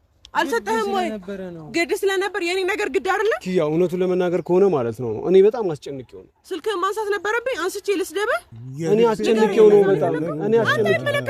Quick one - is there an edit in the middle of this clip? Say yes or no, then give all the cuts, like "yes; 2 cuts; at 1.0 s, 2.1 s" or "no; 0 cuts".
no; 0 cuts